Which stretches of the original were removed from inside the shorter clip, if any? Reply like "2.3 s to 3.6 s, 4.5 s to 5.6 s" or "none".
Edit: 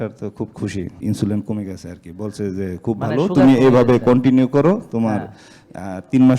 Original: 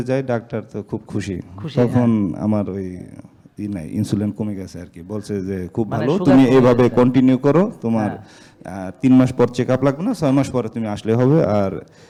1.5 s to 3.9 s